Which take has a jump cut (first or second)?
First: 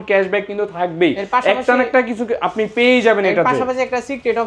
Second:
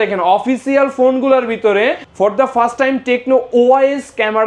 second